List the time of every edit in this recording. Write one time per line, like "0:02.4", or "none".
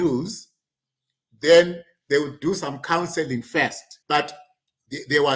0:03.9